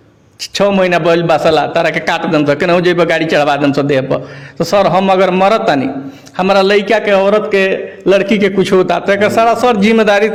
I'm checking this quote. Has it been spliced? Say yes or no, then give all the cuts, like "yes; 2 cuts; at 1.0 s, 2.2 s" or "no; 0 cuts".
no; 0 cuts